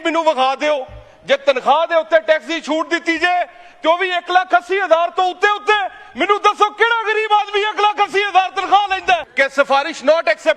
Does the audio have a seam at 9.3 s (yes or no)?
yes